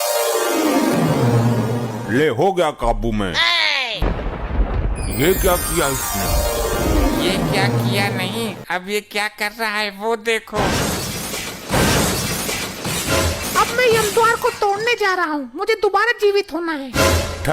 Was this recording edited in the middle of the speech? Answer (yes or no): yes